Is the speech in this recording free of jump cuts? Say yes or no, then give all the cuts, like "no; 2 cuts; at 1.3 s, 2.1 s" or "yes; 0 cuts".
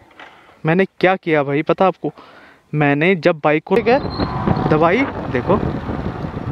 no; 1 cut; at 3.8 s